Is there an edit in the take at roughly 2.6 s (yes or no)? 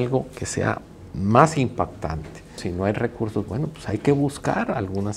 yes